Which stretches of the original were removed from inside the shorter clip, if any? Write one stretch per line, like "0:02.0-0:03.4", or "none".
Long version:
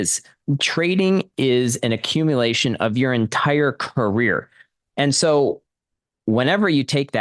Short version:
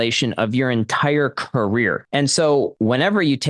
0:04.5-0:04.9
0:05.6-0:06.2